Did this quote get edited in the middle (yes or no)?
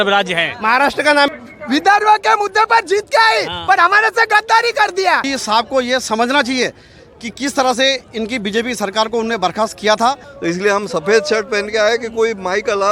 yes